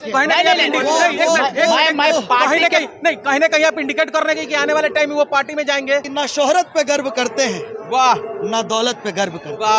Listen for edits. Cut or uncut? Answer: cut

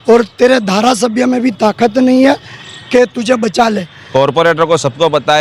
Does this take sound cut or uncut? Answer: cut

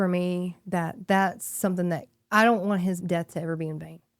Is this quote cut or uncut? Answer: cut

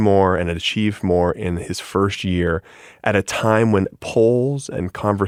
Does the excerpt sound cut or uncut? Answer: uncut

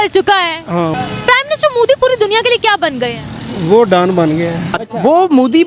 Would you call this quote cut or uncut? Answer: cut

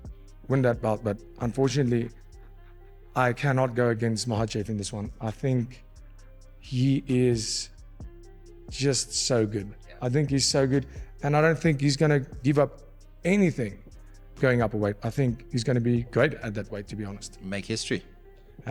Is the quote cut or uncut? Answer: uncut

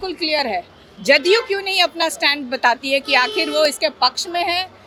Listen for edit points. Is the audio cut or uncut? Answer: uncut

